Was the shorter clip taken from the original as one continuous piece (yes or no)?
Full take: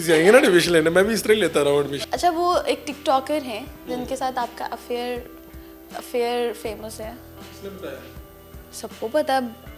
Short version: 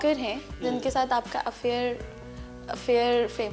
yes